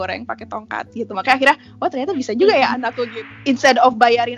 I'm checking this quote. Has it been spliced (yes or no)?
yes